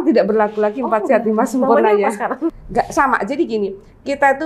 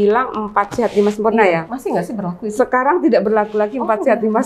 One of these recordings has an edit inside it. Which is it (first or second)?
first